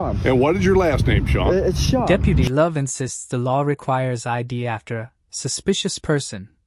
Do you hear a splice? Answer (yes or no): no